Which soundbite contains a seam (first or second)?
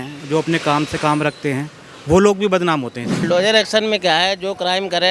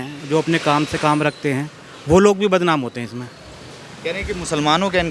first